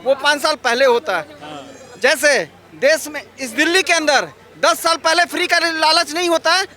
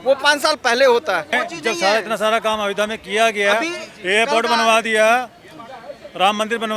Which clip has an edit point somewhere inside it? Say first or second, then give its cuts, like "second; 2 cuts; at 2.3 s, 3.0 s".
second; 1 cut; at 1.3 s